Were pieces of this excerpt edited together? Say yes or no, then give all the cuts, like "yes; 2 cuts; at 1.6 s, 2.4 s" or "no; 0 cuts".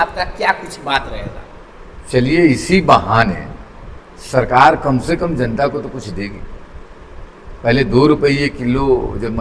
no; 0 cuts